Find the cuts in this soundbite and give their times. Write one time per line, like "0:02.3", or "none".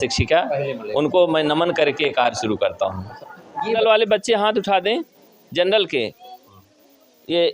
0:03.8